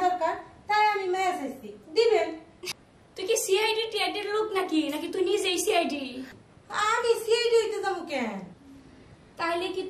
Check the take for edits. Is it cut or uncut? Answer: cut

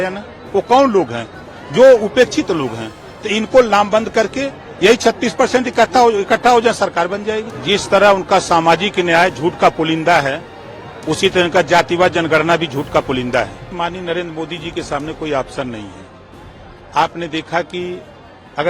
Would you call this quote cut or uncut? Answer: cut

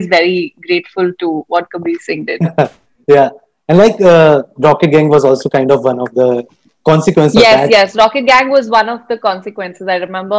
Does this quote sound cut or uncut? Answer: uncut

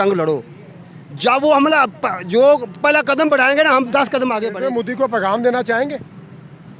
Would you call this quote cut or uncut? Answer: cut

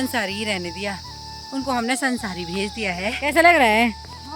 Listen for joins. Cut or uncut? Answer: cut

